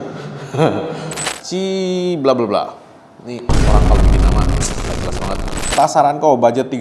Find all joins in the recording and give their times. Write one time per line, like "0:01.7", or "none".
0:01.2
0:05.6